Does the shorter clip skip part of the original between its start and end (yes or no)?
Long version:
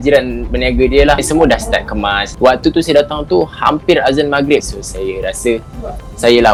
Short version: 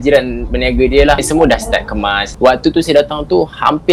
no